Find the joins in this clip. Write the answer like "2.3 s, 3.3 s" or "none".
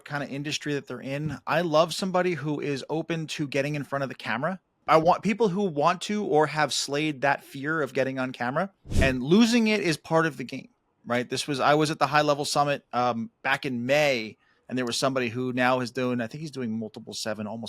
4.7 s, 8.8 s